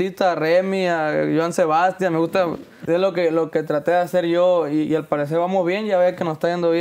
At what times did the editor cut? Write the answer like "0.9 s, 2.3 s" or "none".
2.7 s